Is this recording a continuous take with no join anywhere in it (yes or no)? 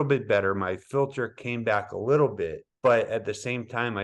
no